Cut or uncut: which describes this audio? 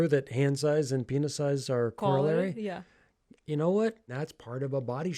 cut